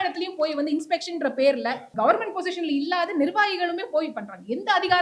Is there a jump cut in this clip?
yes; 1 cut; at 1.9 s

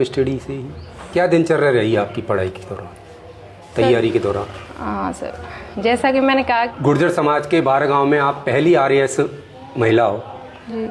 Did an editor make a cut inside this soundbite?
yes; 2 cuts; at 1.0 s, 6.7 s

